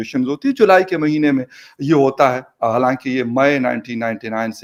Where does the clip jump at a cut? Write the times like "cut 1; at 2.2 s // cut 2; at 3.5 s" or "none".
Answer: none